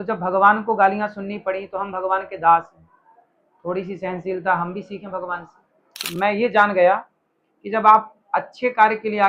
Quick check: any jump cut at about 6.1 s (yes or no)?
yes